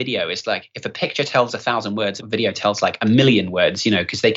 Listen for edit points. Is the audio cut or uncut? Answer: cut